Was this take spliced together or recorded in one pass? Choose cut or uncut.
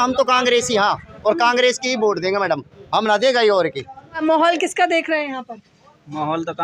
cut